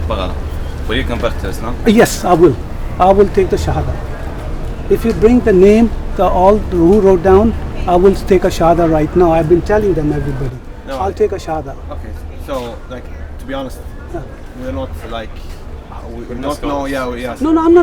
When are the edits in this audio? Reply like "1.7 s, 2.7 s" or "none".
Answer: none